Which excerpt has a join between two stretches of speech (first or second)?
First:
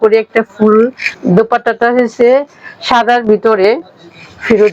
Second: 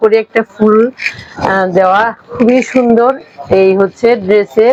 first